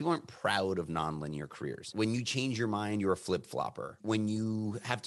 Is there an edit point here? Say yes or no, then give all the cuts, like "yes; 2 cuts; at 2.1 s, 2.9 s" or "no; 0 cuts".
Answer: yes; 2 cuts; at 1.9 s, 4.0 s